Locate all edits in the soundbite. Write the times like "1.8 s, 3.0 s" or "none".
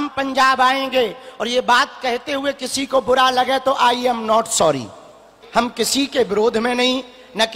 5.4 s